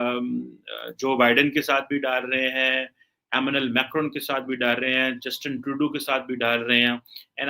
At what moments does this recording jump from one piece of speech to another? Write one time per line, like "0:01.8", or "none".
none